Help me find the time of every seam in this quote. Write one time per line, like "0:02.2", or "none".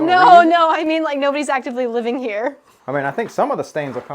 0:02.7

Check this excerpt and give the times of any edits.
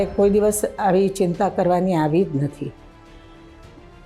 0:03.1

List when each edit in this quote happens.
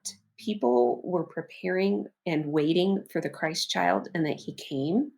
0:02.1

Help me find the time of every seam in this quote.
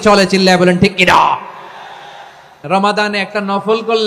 0:02.6

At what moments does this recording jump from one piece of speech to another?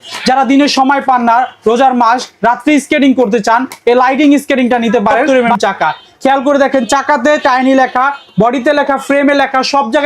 0:05.2

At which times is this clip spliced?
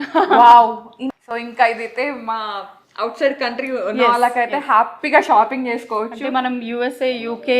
0:00.9

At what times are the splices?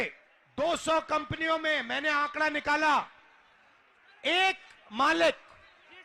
none

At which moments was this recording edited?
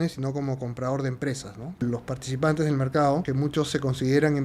0:01.8
0:03.3

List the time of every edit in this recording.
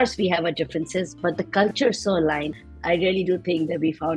0:02.5

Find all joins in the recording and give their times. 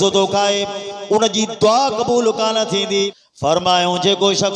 0:03.2

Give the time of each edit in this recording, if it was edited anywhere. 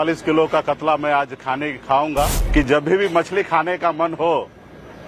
0:02.4

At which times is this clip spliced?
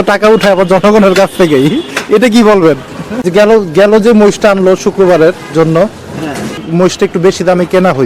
0:03.2
0:06.6

